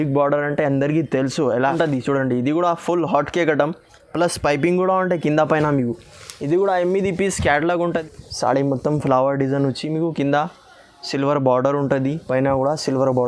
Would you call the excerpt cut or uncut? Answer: cut